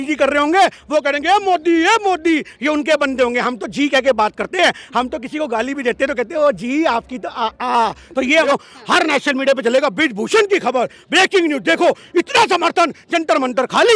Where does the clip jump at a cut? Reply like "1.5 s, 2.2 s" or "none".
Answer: 8.5 s